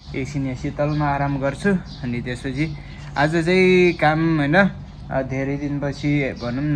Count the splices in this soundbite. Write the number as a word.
zero